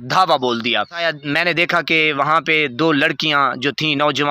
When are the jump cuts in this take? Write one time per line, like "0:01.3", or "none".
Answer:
0:01.0